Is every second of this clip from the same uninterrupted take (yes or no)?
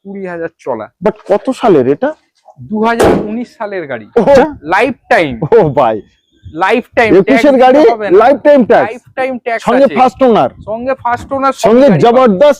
no